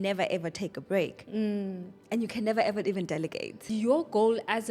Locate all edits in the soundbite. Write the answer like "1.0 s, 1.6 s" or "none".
3.7 s